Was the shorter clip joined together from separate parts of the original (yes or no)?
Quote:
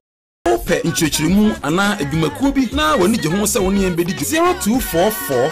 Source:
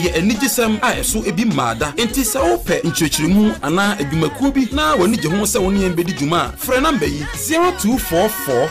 yes